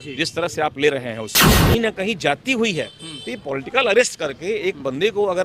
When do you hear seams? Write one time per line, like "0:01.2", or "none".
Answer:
0:01.6